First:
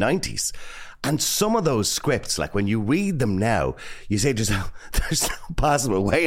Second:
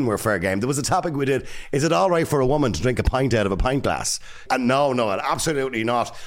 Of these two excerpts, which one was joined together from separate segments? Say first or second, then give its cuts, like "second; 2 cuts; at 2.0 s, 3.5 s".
second; 1 cut; at 4.4 s